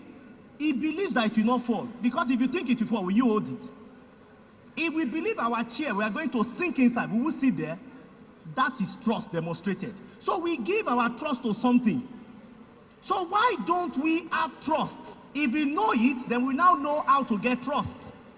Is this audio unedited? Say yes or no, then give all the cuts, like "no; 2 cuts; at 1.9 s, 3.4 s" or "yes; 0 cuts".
yes; 0 cuts